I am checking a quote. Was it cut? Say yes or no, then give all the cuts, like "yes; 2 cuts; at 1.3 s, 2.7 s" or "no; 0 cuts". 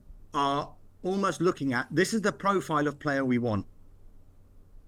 no; 0 cuts